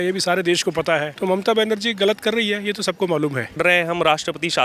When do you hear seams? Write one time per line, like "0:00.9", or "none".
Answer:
0:01.1
0:03.6